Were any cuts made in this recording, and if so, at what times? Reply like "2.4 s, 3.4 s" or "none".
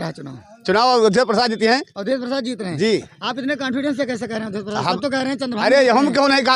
none